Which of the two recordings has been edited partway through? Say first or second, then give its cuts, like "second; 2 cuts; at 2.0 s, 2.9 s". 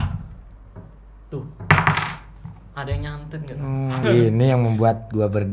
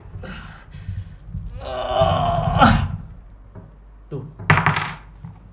first; 1 cut; at 4.0 s